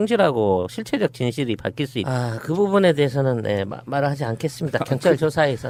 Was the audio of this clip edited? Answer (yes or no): no